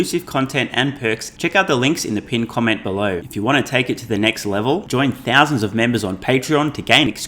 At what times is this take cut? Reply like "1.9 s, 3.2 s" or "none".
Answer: 1.3 s, 3.2 s